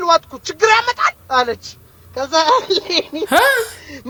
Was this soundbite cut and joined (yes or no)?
no